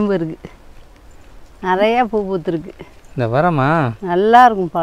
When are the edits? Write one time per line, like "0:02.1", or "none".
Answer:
none